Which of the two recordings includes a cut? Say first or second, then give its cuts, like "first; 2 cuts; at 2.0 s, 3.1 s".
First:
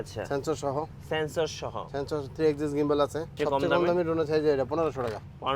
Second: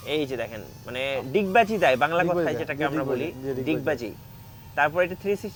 first; 1 cut; at 3.3 s